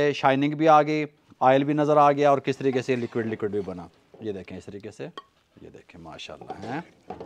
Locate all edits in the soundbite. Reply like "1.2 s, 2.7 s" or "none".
none